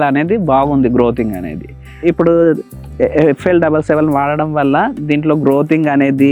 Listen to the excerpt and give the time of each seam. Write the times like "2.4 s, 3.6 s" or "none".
2.0 s